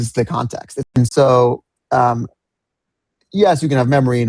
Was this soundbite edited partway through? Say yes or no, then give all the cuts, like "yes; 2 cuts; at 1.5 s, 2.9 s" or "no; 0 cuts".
yes; 1 cut; at 1.0 s